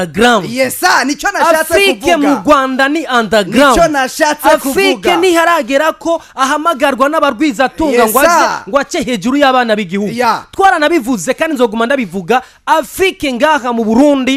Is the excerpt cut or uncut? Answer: uncut